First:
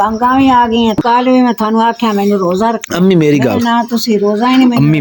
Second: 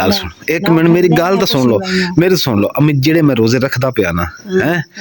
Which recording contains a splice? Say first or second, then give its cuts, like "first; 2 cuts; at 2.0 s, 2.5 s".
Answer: first; 1 cut; at 1.0 s